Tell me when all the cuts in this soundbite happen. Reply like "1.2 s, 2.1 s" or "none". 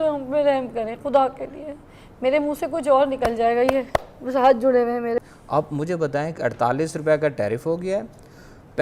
5.2 s